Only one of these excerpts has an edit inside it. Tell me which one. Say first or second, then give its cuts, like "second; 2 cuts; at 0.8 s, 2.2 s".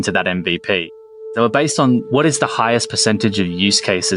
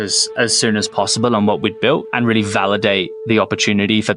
first; 1 cut; at 1.2 s